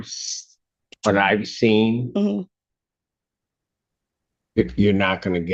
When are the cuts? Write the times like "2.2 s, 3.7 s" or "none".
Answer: none